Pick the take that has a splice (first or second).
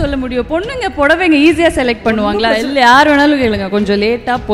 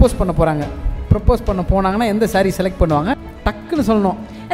second